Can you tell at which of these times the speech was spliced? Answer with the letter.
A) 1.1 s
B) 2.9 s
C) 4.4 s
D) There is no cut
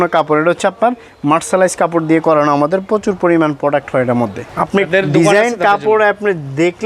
C